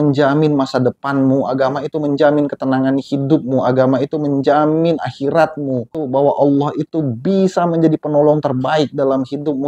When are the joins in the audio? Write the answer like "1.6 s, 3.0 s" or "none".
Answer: 6.0 s